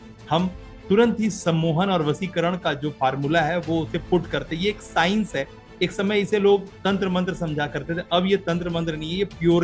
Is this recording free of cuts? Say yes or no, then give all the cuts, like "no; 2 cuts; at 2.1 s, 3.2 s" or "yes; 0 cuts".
yes; 0 cuts